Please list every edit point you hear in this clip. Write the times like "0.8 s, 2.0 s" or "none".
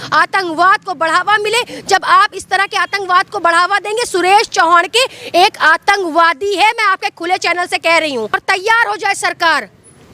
8.4 s

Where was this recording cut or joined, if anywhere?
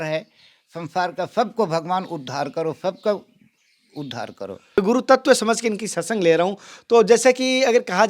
4.8 s

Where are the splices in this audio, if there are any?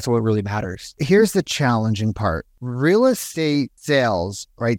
1.0 s, 2.6 s, 3.5 s

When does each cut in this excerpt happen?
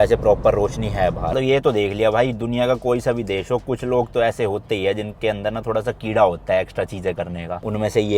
1.2 s

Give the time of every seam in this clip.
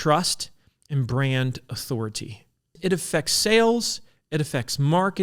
2.7 s

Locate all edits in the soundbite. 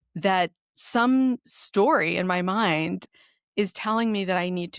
3.0 s

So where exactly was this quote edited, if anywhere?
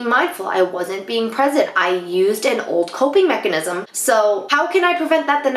4.5 s

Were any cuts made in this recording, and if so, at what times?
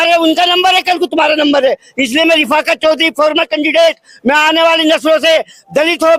none

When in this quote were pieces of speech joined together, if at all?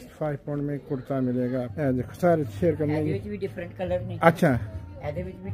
1.7 s

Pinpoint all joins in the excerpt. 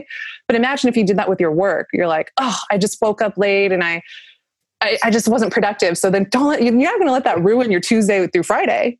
none

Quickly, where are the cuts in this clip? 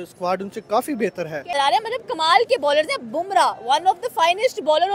1.6 s

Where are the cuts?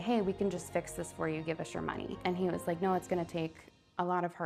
none

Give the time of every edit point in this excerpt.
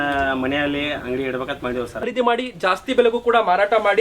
2.0 s

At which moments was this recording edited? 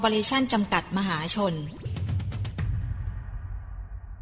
1.9 s

